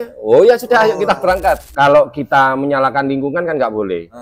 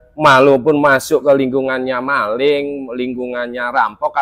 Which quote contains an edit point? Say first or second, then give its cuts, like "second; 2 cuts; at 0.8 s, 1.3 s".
first; 1 cut; at 1.7 s